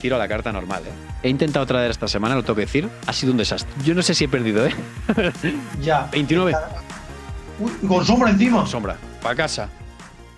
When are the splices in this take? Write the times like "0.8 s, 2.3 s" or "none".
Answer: none